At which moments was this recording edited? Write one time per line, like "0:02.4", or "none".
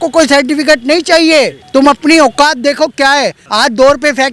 0:03.4